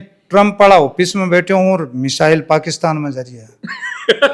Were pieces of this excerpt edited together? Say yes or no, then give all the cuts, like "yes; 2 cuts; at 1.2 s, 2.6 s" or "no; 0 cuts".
no; 0 cuts